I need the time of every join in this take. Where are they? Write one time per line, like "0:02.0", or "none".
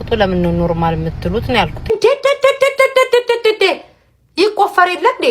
0:01.8